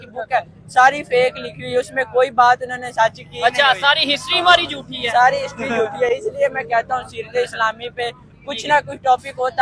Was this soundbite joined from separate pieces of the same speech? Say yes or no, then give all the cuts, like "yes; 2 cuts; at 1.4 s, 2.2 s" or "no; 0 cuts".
no; 0 cuts